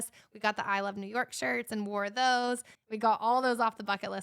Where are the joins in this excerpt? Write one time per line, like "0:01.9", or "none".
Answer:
0:02.7